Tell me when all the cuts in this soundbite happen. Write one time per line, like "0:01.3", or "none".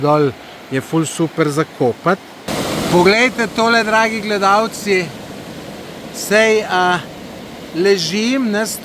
0:02.5